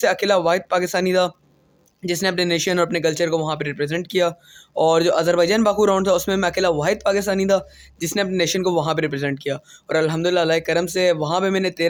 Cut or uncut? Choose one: uncut